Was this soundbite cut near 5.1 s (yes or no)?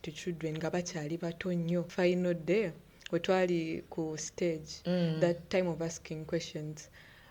no